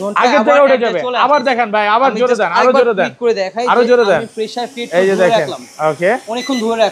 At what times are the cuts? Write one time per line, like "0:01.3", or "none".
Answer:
none